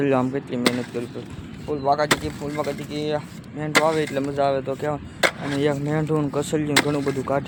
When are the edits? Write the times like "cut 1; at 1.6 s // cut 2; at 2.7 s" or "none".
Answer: none